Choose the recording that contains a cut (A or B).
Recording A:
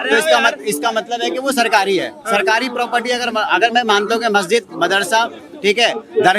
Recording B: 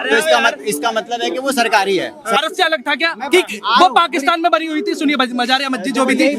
B